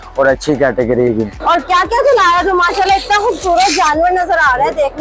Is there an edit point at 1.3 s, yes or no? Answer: yes